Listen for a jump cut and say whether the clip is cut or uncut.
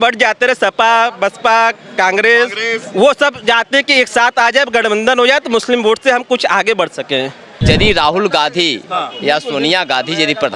cut